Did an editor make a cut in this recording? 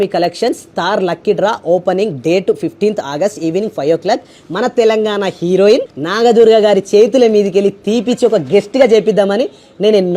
yes; 1 cut; at 6.0 s

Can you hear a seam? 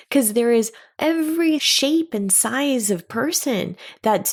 no; 0 cuts

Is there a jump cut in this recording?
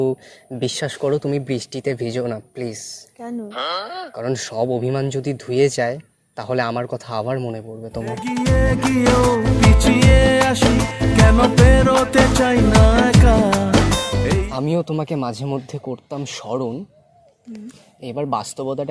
yes; 1 cut; at 14.4 s

